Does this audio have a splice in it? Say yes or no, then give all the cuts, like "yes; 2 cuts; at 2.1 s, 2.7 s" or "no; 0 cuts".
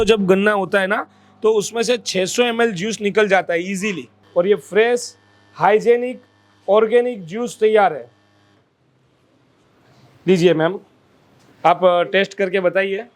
yes; 1 cut; at 4.1 s